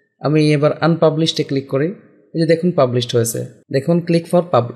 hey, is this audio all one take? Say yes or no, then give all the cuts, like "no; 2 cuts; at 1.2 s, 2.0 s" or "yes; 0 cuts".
no; 1 cut; at 3.5 s